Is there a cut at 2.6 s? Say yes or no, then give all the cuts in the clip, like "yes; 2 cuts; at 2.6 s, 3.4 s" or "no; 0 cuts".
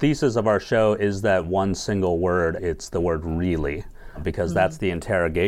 yes; 1 cut; at 2.6 s